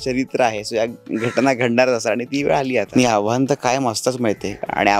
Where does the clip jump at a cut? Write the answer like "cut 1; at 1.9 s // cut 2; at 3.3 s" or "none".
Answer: cut 1; at 2.9 s